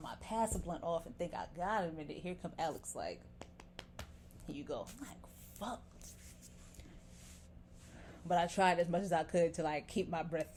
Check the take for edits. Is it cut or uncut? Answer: uncut